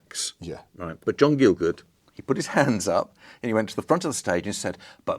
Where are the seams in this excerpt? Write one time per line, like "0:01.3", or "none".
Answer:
0:01.0